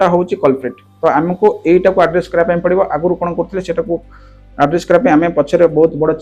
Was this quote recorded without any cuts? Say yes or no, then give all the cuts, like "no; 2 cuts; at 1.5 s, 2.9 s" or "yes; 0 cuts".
yes; 0 cuts